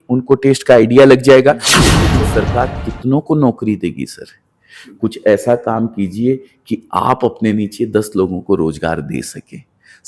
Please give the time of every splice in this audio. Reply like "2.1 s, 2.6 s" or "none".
1.9 s

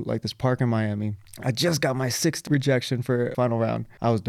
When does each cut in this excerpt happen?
1.2 s, 2.4 s, 3.4 s

